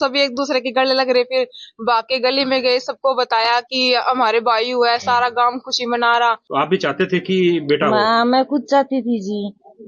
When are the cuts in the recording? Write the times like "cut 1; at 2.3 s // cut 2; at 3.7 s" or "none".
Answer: cut 1; at 6.4 s